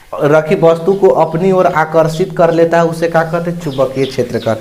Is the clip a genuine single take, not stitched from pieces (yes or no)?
yes